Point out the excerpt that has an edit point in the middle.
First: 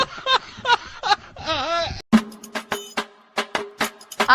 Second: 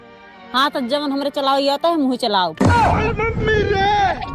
first; 1 cut; at 2.0 s

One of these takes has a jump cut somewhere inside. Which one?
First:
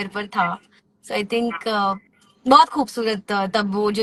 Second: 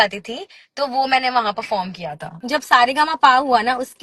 second; 1 cut; at 2.3 s

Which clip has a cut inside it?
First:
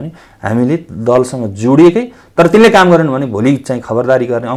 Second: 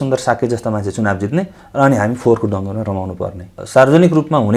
second; 1 cut; at 3.5 s

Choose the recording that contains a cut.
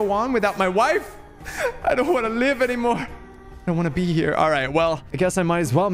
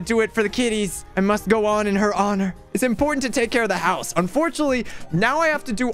second; 2 cuts; at 1.0 s, 2.6 s

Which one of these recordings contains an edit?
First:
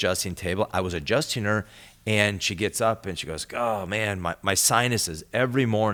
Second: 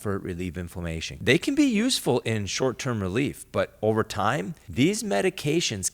second; 2 cuts; at 1.2 s, 4.6 s

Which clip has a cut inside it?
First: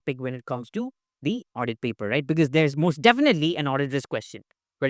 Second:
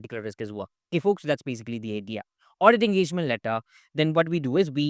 second; 1 cut; at 2.4 s

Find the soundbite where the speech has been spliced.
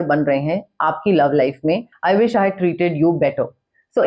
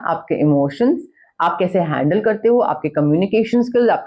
first; 1 cut; at 1.9 s

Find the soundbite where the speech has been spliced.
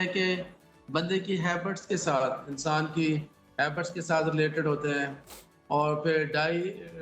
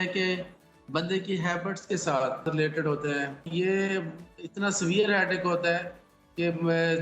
second; 2 cuts; at 2.4 s, 3.5 s

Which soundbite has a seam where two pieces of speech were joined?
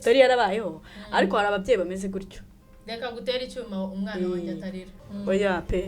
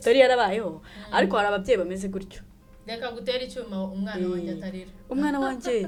first; 1 cut; at 4.9 s

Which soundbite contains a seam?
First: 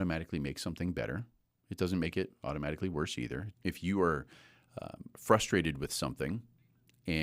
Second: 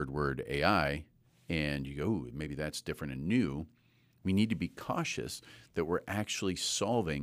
first; 1 cut; at 3.5 s

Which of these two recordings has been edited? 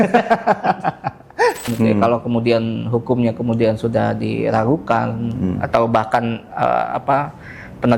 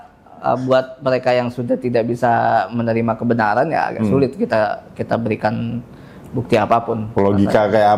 first; 1 cut; at 1.7 s

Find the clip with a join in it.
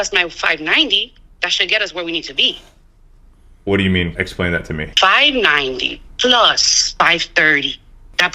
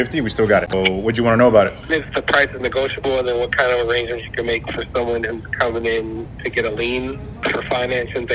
second; 3 cuts; at 0.7 s, 1.9 s, 7.3 s

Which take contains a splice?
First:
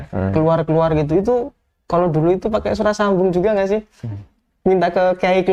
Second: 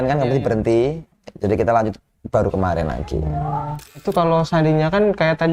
second; 1 cut; at 4.0 s

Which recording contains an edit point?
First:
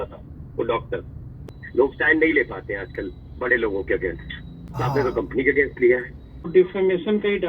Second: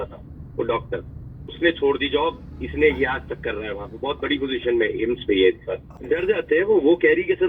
first; 2 cuts; at 1.5 s, 6.5 s

